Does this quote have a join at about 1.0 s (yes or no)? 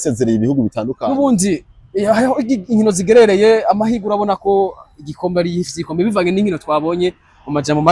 yes